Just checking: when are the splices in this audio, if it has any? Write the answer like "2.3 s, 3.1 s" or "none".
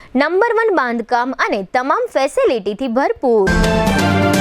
3.5 s